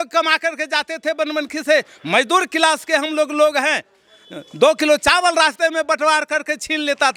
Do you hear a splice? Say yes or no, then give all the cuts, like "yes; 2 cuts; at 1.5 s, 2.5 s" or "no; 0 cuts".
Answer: no; 0 cuts